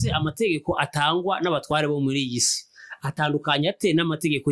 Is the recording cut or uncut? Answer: uncut